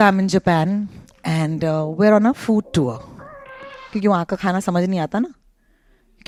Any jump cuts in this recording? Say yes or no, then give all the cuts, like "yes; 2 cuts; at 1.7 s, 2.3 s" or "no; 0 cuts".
no; 0 cuts